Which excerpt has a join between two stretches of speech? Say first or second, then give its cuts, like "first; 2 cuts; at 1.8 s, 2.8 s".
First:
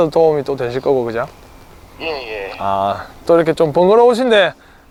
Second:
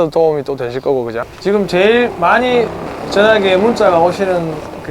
second; 1 cut; at 1.3 s